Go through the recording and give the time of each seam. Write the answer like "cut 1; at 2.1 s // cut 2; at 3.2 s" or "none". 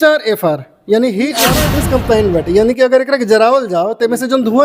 cut 1; at 1.6 s